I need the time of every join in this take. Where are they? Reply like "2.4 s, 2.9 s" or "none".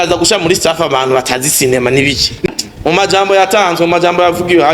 2.5 s